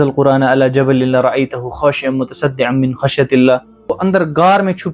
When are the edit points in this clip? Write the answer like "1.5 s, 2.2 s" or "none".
4.0 s